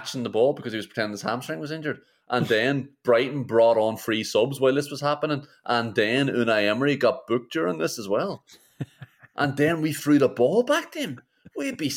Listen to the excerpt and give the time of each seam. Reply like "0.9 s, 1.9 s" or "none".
none